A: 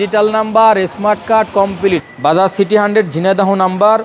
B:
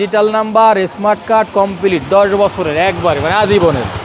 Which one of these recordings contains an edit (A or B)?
A